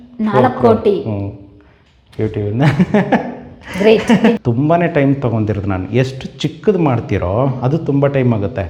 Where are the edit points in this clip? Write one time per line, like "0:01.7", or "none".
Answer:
0:04.4